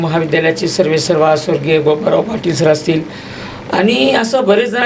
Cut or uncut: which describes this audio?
uncut